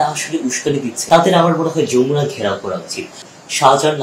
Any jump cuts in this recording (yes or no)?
yes